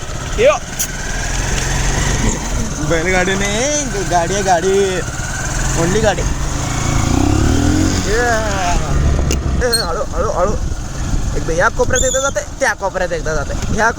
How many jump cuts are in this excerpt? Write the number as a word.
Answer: one